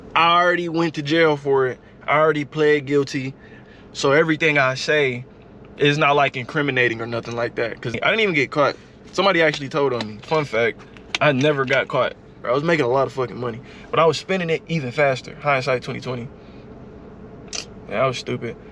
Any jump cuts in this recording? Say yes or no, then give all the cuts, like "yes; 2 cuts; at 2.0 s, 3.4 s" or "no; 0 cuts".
yes; 3 cuts; at 3.6 s, 7.9 s, 12.4 s